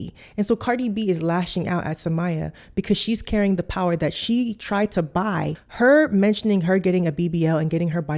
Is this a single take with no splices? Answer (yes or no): no